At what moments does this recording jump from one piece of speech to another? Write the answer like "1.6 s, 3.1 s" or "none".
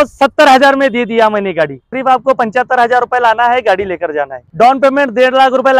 1.9 s, 4.4 s